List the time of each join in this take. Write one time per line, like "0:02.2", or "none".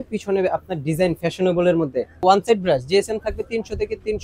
0:02.2